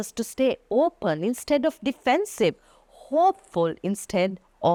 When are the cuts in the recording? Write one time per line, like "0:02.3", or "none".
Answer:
none